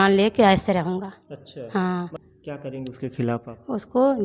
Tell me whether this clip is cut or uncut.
cut